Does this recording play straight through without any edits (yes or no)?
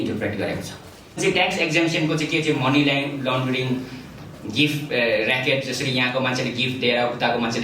no